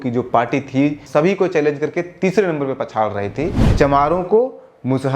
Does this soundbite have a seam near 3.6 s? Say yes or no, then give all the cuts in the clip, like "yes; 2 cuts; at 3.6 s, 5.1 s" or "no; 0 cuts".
yes; 2 cuts; at 1.0 s, 3.6 s